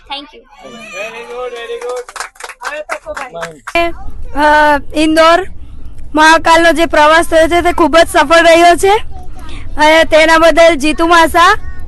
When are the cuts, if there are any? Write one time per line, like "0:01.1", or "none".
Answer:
0:03.8